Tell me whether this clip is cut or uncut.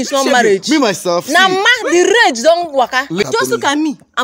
cut